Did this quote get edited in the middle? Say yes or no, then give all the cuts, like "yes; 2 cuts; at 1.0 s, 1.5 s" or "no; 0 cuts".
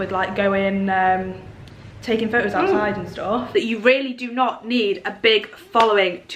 yes; 1 cut; at 3.5 s